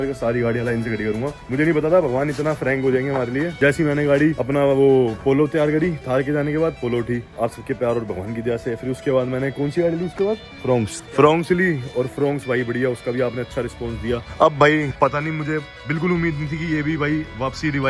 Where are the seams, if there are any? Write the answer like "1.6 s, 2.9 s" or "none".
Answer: none